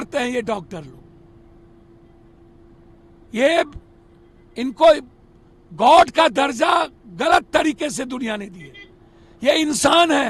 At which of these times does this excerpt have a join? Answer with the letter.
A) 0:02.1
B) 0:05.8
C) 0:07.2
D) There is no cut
D